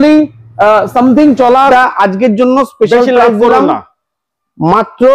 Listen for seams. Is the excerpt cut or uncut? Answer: cut